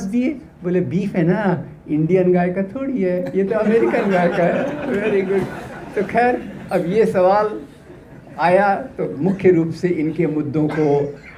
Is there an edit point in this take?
no; 0 cuts

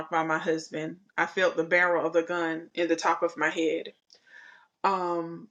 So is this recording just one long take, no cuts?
yes; 0 cuts

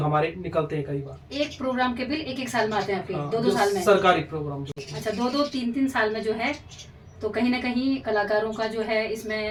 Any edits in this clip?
no; 0 cuts

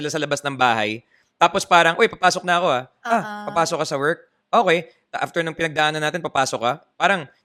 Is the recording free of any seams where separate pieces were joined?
yes; 0 cuts

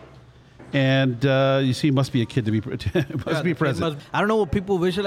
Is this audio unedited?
no; 1 cut; at 4.0 s

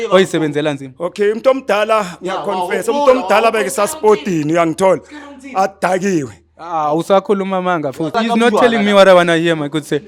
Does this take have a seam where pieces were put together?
no; 0 cuts

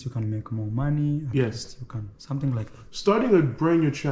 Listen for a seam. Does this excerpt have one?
no; 0 cuts

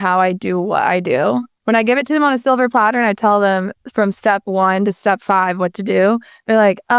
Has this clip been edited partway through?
yes; 1 cut; at 1.5 s

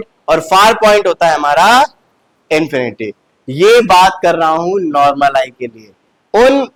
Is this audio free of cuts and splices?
yes; 0 cuts

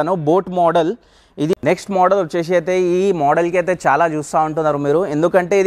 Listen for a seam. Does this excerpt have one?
yes; 1 cut; at 1.5 s

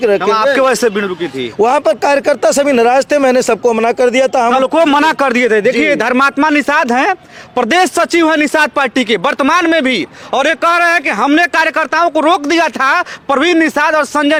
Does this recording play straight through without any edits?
yes; 0 cuts

